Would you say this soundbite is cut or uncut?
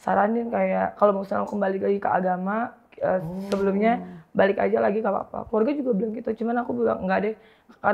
uncut